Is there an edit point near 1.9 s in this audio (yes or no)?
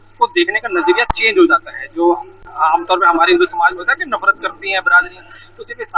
no